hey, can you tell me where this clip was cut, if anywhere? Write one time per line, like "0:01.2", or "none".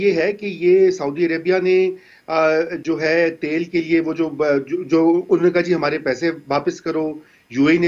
none